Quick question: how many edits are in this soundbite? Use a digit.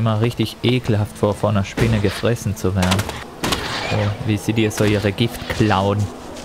1